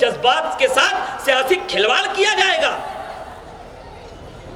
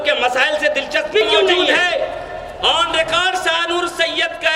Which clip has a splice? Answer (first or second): second